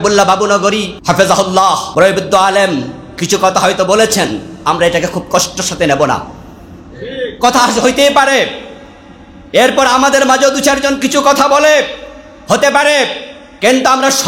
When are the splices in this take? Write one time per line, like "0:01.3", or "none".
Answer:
0:00.9
0:01.8